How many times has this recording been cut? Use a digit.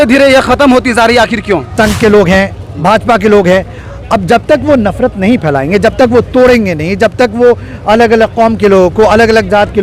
1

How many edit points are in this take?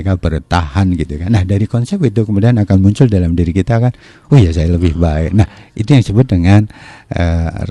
0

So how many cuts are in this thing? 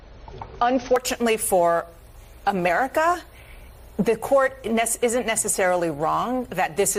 0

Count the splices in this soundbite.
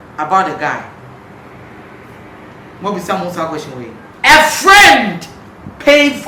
1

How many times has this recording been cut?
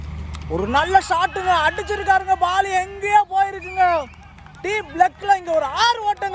0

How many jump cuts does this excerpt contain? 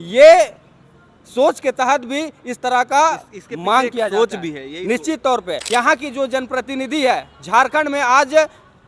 1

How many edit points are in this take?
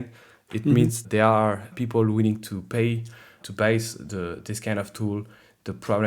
1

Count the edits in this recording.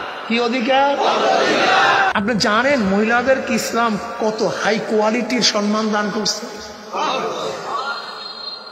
1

